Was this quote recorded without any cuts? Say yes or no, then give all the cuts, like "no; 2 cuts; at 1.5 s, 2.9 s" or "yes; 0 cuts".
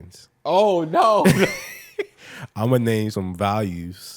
no; 1 cut; at 3.1 s